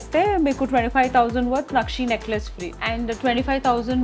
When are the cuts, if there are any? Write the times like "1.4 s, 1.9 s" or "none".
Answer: 2.7 s